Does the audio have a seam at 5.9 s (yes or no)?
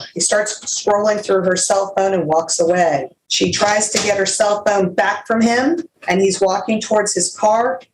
yes